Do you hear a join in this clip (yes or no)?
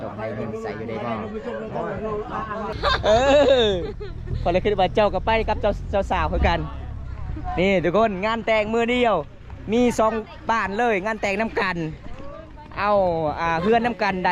yes